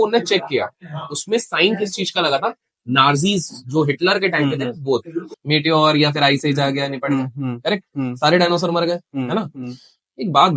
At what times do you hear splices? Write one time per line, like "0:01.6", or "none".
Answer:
0:05.4